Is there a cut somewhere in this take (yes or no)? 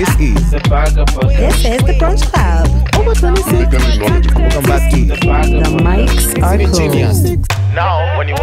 no